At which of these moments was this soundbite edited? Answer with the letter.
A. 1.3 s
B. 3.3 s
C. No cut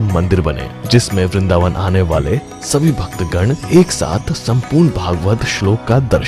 A